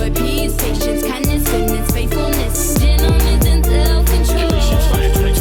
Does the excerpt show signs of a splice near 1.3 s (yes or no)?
no